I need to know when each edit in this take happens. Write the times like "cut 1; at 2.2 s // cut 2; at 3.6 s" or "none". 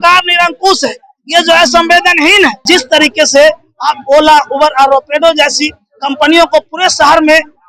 cut 1; at 2.6 s